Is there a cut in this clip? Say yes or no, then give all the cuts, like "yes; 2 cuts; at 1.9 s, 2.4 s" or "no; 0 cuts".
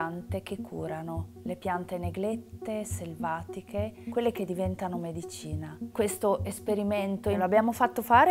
yes; 2 cuts; at 5.8 s, 7.4 s